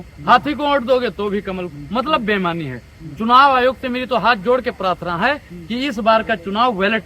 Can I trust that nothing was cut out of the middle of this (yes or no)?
yes